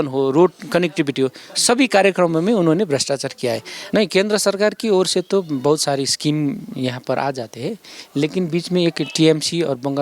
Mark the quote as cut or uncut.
cut